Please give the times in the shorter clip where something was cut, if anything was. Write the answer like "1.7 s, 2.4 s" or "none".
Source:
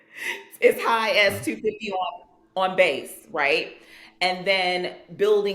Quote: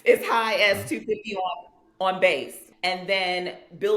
2.6 s